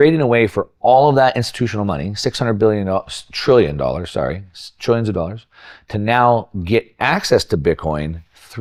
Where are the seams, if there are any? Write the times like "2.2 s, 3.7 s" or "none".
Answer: none